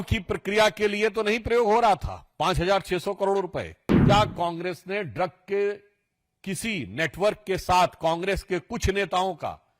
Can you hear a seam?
yes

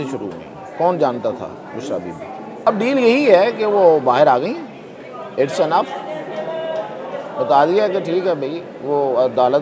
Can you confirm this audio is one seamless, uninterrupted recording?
no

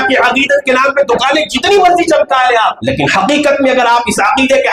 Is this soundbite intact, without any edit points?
no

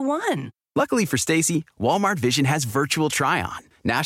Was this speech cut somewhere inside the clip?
no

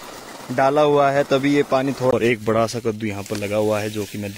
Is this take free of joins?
no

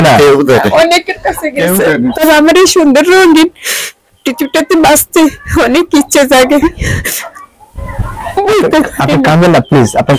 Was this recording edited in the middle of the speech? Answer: yes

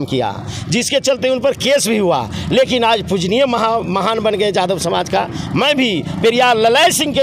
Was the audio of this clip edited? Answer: no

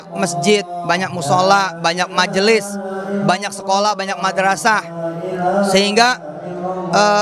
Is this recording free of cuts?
yes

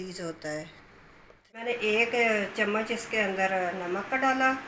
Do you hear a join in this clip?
yes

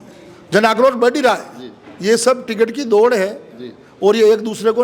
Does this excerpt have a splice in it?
no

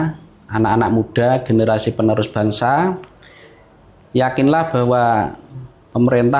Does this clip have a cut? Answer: no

